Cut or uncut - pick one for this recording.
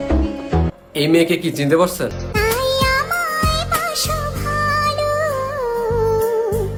uncut